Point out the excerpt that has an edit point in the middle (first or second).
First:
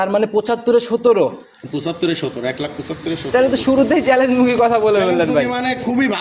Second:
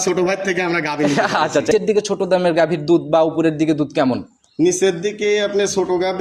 second